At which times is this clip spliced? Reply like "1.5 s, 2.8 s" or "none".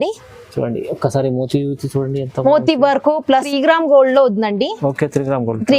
3.5 s